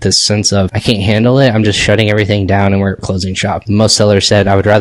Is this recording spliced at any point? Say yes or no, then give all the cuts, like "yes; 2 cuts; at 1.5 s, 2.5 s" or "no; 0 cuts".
no; 0 cuts